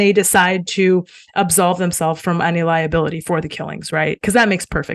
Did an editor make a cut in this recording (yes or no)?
no